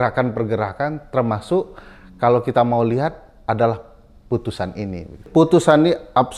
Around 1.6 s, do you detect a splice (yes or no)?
no